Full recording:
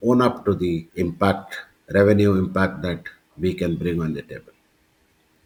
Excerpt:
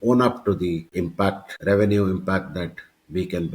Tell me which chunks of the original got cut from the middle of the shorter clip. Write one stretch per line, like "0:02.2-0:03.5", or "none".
0:01.0-0:01.3